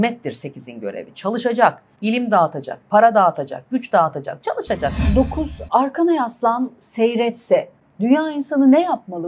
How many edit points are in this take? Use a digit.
2